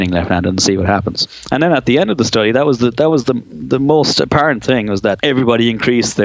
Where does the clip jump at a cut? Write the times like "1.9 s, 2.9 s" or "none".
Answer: 1.3 s, 5.2 s